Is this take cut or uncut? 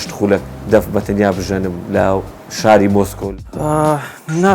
cut